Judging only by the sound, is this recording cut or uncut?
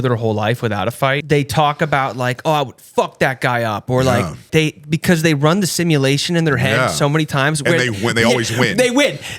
cut